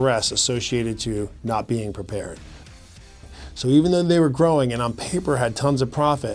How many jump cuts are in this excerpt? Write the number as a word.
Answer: one